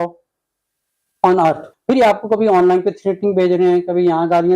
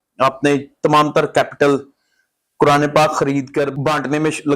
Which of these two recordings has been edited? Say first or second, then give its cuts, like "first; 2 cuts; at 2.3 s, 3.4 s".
first; 1 cut; at 1.7 s